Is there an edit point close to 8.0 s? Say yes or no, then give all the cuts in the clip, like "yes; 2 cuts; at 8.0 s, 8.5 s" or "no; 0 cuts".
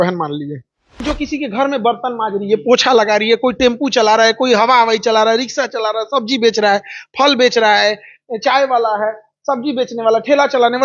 no; 1 cut; at 1.0 s